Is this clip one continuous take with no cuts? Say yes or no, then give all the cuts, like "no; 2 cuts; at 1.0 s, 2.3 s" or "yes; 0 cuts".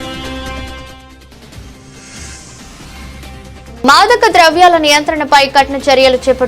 no; 1 cut; at 3.0 s